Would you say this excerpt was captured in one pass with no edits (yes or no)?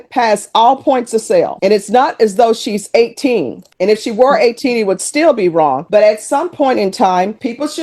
yes